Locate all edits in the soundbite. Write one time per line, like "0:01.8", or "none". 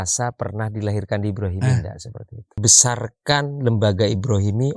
0:02.6

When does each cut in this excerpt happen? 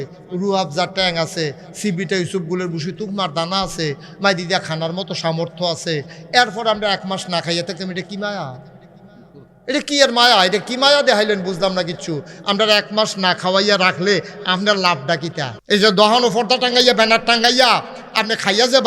0:15.6

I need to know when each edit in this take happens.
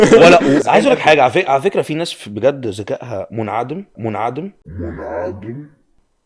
none

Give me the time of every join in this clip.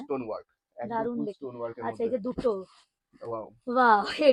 none

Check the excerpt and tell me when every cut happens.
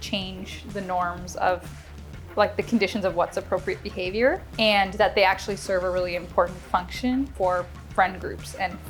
0:04.5
0:07.3

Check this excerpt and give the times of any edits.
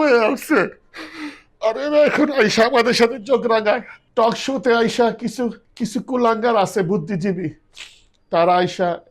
0:04.0
0:05.6

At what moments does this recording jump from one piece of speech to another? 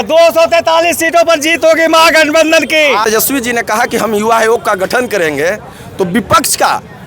0:03.0

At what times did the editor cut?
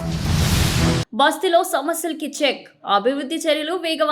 0:01.1

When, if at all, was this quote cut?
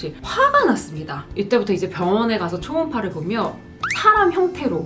0:01.2

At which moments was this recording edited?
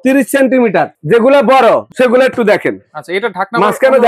0:01.0
0:01.9

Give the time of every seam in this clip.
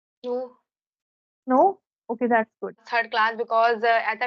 0:02.8

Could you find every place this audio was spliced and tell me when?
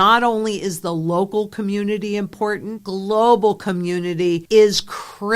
0:02.7
0:04.4

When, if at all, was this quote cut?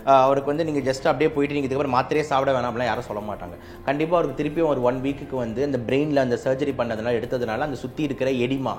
none

